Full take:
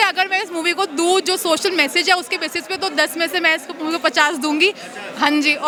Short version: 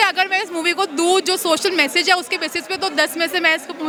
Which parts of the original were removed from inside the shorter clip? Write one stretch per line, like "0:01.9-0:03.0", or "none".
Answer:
none